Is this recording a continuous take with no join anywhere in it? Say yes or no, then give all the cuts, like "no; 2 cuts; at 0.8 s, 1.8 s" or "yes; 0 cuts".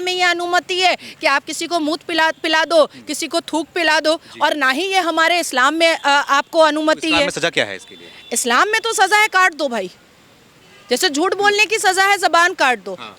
yes; 0 cuts